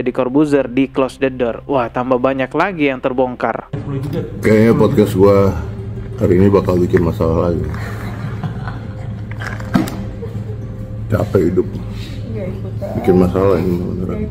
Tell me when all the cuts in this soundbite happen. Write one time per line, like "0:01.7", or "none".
none